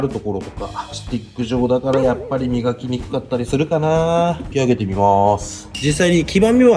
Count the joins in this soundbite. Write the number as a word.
three